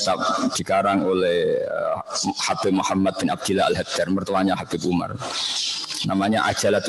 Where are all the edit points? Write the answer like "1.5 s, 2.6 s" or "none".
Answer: none

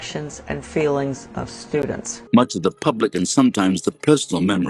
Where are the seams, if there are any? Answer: 2.1 s

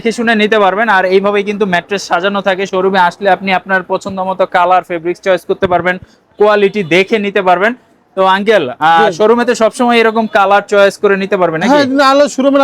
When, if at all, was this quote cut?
none

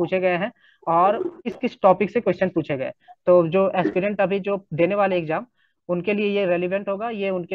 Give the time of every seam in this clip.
1.4 s

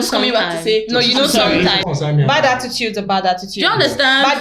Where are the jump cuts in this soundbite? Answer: 1.8 s

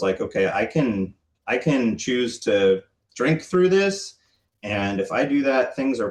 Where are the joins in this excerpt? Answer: none

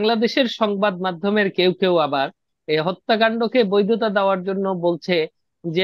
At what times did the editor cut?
none

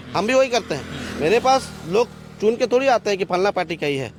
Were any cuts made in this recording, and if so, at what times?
none

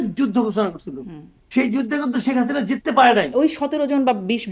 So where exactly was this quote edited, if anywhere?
3.3 s

